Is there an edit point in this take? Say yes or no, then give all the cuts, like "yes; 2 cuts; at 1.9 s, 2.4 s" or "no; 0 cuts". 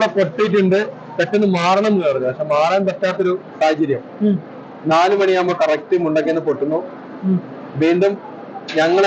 no; 0 cuts